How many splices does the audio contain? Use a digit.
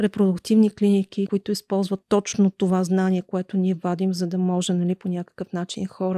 1